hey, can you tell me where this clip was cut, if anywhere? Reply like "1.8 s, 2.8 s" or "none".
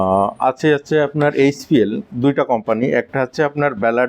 none